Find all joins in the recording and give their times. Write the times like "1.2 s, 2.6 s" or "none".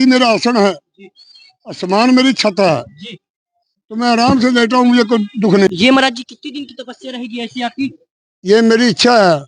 5.7 s

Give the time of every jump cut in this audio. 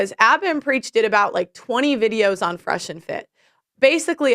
3.4 s

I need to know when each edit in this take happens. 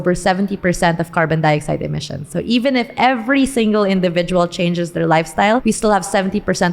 5.6 s

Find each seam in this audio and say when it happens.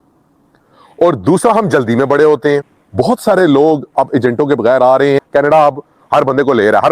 2.8 s, 5.2 s

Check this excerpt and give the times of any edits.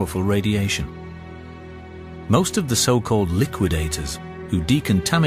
3.5 s

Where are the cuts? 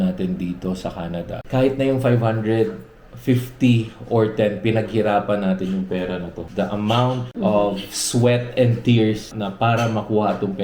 1.4 s, 6.4 s, 7.3 s, 9.3 s

